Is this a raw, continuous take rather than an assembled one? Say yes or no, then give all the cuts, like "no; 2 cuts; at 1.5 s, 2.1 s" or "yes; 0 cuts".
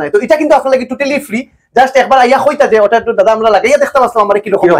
yes; 0 cuts